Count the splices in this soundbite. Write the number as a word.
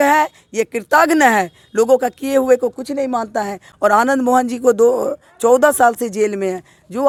zero